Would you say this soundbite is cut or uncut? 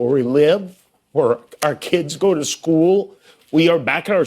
uncut